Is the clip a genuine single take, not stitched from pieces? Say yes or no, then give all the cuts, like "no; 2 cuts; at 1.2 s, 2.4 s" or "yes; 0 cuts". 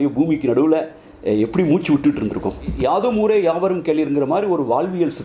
no; 1 cut; at 2.7 s